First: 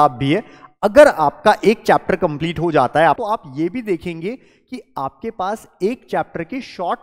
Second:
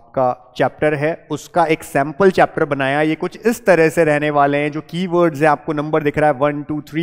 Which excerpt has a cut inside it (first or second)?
first